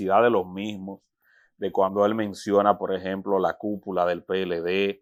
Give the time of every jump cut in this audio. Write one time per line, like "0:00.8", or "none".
none